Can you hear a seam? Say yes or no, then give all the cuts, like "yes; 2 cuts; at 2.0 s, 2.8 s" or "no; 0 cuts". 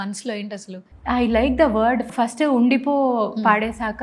yes; 1 cut; at 2.1 s